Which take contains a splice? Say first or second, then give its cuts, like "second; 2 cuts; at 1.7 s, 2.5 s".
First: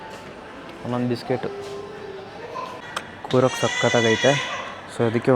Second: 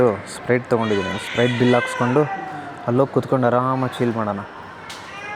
first; 1 cut; at 2.8 s